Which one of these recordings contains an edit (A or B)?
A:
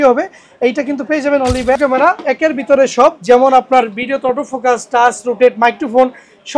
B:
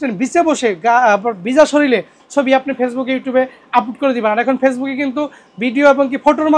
A